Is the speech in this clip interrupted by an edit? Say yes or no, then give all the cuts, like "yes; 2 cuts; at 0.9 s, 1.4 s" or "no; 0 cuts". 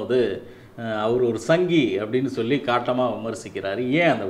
no; 0 cuts